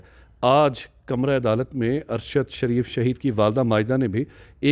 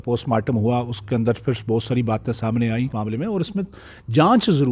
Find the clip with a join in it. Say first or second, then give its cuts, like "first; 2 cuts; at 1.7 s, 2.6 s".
second; 1 cut; at 2.9 s